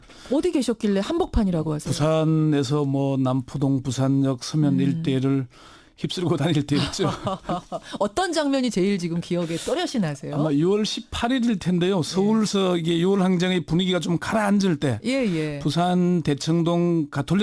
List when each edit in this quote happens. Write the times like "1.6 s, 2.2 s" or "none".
none